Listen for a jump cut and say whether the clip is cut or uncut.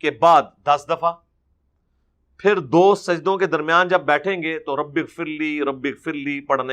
uncut